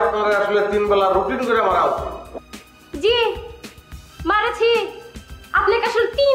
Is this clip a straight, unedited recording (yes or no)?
yes